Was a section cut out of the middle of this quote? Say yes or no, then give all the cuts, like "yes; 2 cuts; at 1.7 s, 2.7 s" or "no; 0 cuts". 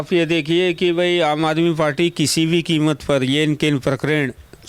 no; 0 cuts